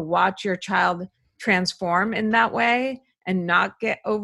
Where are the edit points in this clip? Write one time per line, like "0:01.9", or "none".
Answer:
none

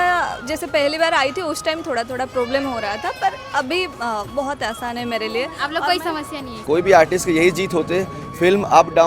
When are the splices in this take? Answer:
0:06.5

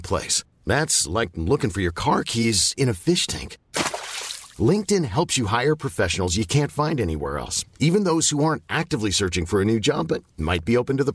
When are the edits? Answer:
none

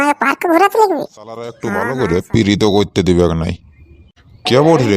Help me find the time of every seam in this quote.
0:01.7

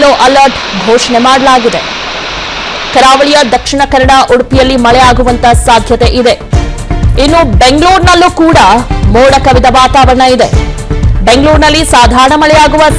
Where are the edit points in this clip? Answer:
none

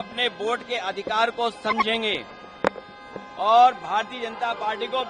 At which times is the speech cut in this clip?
none

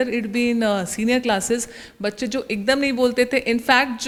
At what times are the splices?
none

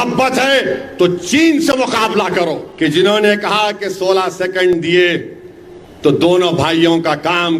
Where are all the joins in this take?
0:02.7

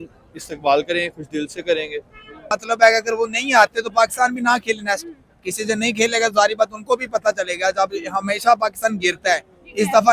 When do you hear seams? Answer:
0:02.5

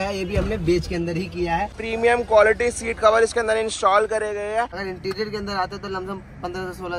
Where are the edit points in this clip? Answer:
0:01.8
0:04.8

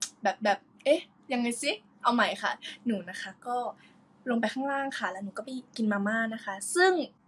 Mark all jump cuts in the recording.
0:01.1

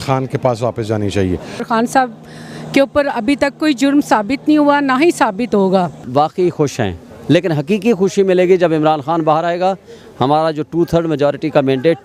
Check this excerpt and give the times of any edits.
0:01.6
0:06.0

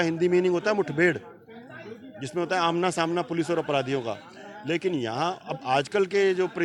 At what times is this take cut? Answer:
none

